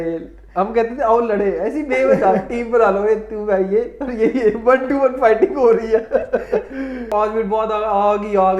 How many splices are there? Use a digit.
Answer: 1